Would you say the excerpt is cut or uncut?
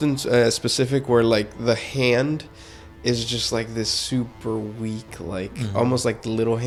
uncut